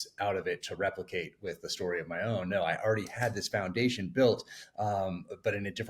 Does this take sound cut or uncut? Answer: uncut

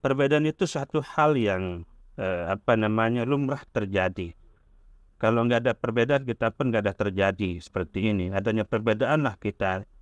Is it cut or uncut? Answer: uncut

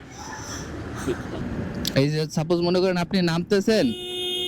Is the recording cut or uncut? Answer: cut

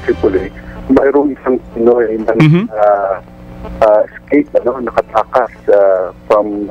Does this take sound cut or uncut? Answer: uncut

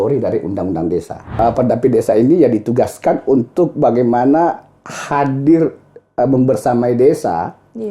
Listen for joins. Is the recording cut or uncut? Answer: cut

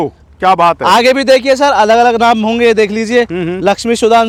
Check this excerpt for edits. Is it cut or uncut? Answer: uncut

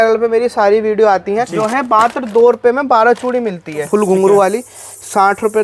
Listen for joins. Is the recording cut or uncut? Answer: cut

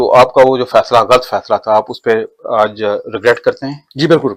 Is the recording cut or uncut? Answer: uncut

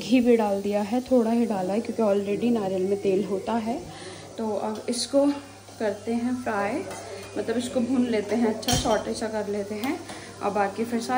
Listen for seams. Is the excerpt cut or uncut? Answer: uncut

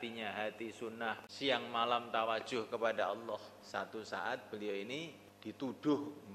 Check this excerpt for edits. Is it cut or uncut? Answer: cut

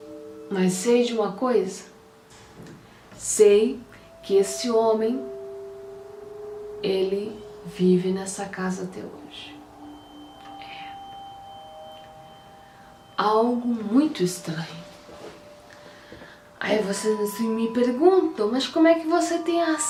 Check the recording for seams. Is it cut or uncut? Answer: uncut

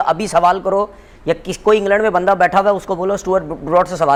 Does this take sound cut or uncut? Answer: uncut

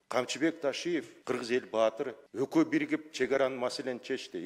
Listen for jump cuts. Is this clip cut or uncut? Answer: cut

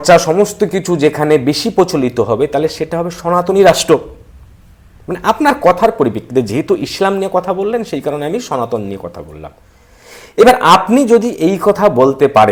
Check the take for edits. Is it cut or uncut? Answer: uncut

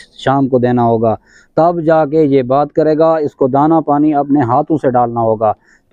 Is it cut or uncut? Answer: uncut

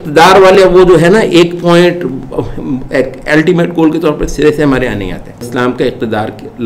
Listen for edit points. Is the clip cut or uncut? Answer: cut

